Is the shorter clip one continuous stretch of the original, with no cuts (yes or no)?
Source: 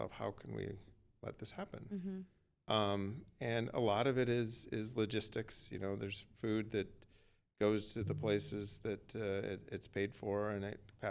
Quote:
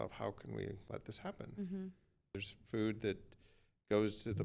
no